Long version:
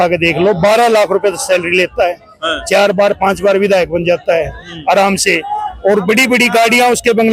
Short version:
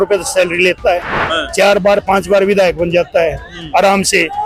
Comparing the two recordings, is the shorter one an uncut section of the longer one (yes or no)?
yes